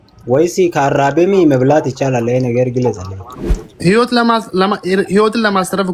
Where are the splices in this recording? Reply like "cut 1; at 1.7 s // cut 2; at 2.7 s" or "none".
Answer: none